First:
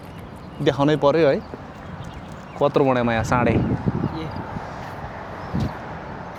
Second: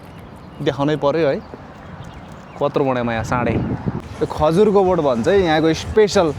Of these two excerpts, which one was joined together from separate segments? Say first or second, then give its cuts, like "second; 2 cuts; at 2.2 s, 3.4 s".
second; 1 cut; at 4.0 s